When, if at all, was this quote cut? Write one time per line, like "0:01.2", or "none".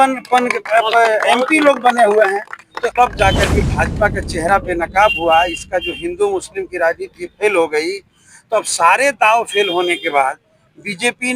0:02.7

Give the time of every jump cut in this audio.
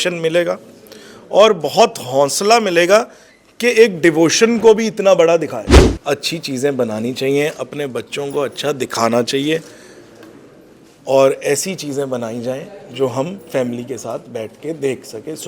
0:05.8

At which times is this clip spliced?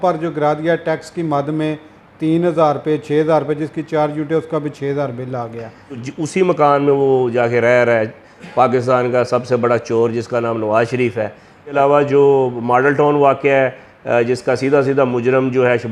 0:06.0
0:11.7

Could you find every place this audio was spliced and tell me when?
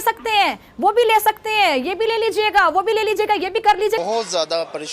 0:04.0

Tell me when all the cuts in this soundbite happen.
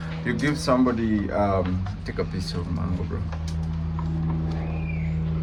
none

